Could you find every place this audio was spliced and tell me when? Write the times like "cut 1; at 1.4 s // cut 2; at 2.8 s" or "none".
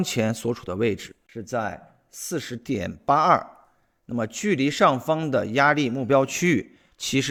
none